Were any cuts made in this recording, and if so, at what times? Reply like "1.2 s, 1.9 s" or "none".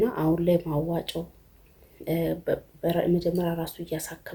none